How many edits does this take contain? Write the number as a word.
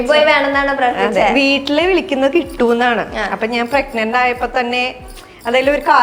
zero